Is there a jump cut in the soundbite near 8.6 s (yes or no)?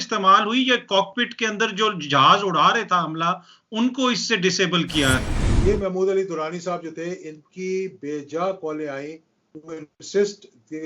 no